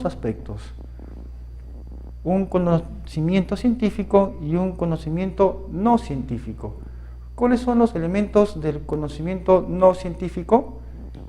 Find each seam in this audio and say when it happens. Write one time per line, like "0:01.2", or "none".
0:03.9

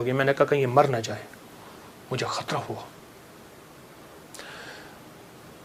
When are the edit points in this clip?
none

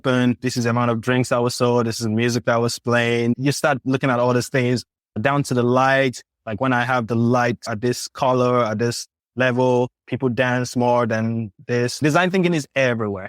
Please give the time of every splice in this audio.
0:10.0
0:11.5

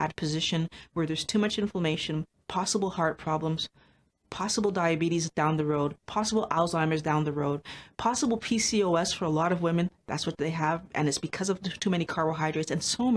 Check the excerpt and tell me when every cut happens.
none

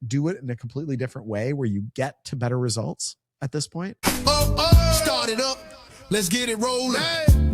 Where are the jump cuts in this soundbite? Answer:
0:03.9

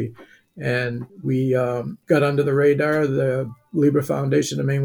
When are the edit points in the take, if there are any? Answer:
0:01.1
0:01.9

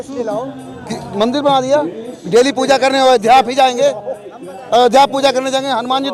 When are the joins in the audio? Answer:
none

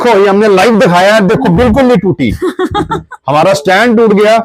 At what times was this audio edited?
none

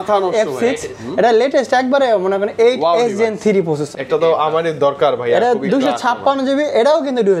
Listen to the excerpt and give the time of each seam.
0:03.9

